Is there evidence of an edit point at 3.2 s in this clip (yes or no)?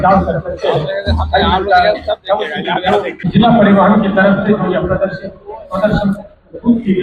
yes